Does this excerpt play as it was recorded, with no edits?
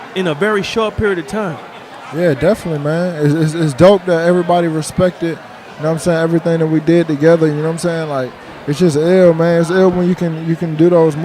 yes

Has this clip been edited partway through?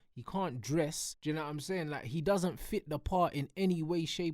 yes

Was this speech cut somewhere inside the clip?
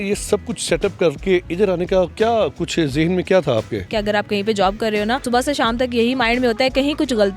yes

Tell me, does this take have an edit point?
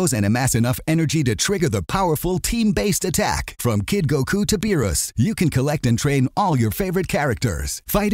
no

